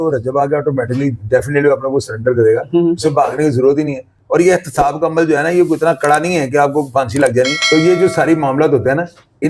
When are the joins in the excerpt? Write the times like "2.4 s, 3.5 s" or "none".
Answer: none

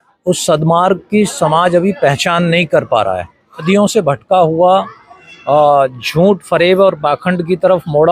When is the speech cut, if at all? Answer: 3.6 s

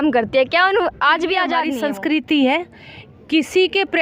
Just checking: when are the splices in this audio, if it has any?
1.7 s

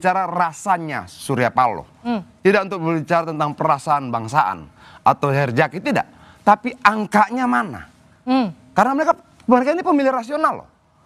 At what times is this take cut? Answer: none

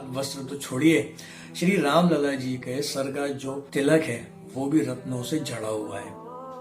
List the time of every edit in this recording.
3.6 s

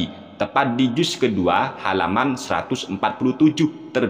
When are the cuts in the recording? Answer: none

